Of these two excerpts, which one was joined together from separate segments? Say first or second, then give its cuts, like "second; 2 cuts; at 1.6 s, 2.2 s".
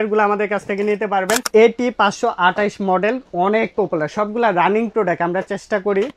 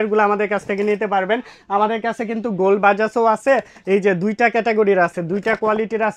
first; 1 cut; at 1.5 s